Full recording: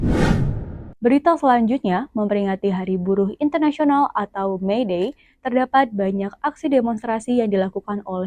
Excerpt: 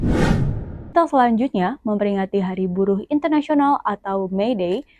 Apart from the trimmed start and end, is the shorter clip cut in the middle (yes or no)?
yes